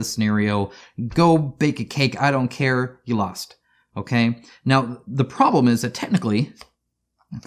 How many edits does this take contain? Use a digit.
0